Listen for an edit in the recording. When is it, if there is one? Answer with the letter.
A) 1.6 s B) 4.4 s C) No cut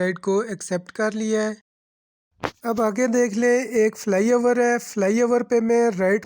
A